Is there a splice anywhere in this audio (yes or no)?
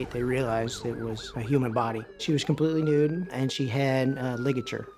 no